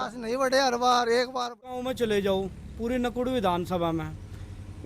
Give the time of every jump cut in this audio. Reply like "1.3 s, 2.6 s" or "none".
1.7 s